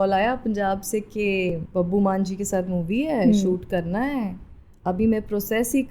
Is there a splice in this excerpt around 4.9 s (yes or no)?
no